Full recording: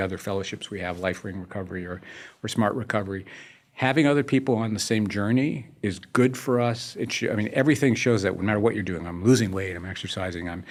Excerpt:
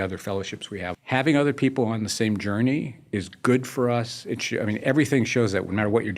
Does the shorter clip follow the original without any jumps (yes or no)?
no